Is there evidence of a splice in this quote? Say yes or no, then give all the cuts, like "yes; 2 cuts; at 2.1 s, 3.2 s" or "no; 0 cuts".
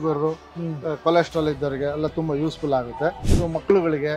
yes; 1 cut; at 3.2 s